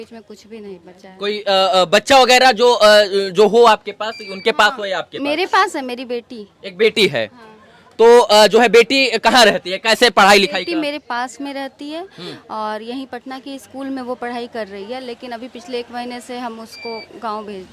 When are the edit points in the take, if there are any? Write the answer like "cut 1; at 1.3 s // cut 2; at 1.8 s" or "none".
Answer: none